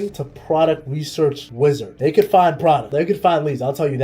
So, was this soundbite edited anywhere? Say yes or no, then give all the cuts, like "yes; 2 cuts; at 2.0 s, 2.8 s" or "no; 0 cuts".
yes; 1 cut; at 1.9 s